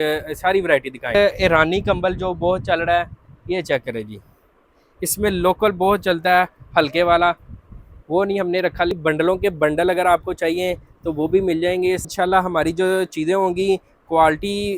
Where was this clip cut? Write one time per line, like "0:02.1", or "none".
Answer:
0:01.1
0:09.0
0:12.0